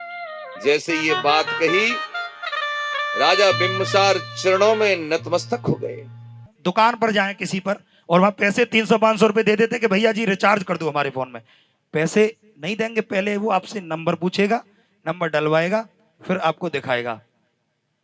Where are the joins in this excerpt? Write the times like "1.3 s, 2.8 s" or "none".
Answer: 6.5 s